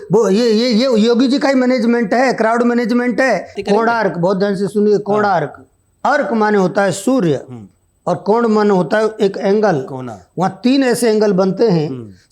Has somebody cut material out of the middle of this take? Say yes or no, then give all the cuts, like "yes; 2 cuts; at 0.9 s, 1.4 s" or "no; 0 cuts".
yes; 1 cut; at 3.5 s